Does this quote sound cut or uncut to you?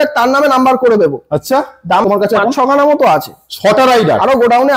cut